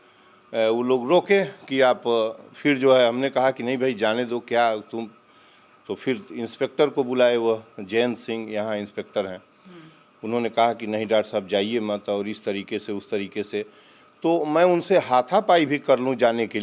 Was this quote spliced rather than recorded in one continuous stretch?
no; 0 cuts

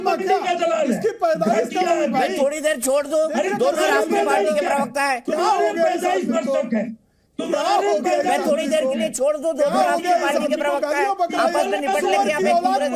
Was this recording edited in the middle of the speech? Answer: no; 0 cuts

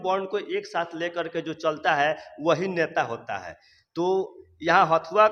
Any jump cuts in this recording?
no; 0 cuts

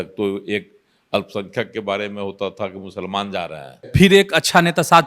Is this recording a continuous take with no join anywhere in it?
no; 1 cut; at 3.9 s

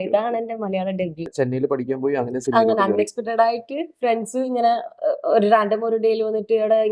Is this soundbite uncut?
no; 1 cut; at 1.2 s

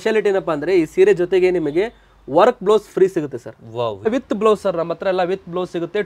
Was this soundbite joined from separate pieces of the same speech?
yes; 1 cut; at 4.1 s

